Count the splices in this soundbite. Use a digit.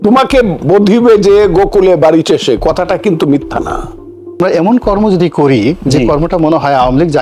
1